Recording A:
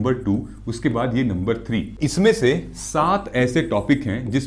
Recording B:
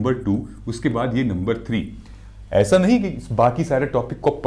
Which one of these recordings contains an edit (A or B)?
A